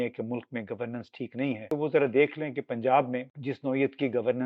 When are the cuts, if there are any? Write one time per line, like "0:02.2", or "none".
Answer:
0:01.7
0:03.3